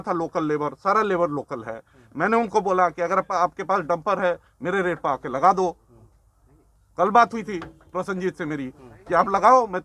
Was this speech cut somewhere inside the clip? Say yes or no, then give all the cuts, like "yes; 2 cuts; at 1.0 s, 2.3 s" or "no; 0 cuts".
no; 0 cuts